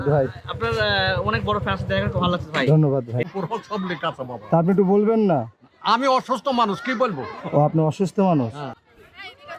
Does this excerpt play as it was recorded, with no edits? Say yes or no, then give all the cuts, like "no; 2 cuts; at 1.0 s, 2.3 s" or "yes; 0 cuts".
no; 4 cuts; at 1.8 s, 3.3 s, 7.5 s, 8.7 s